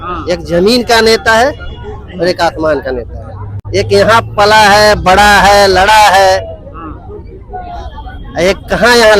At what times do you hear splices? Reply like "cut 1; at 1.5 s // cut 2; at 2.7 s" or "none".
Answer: none